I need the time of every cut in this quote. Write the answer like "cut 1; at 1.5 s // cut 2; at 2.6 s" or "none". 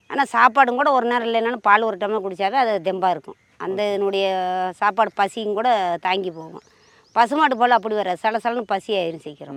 none